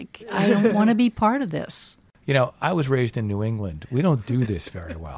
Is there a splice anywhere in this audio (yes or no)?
yes